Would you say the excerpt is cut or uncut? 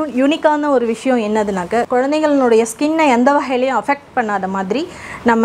cut